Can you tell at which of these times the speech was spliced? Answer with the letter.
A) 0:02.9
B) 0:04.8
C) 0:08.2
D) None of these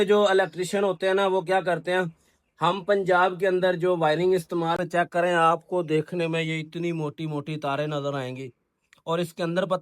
B